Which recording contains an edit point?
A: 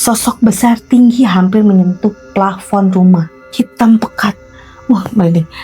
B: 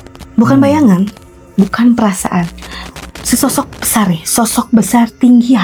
A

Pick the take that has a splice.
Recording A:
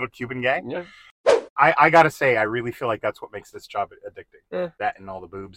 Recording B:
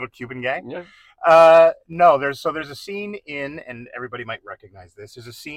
A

